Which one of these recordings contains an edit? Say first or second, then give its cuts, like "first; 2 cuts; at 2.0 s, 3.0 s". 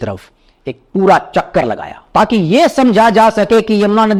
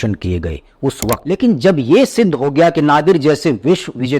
second; 1 cut; at 1.2 s